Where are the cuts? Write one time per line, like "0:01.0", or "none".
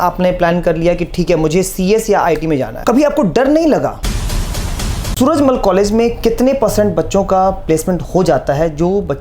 0:02.7
0:04.6